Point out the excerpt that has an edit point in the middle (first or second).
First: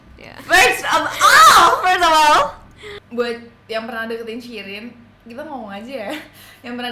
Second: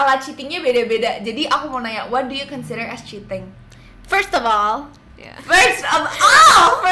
first